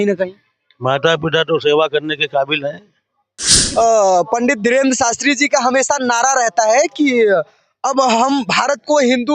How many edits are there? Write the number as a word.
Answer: one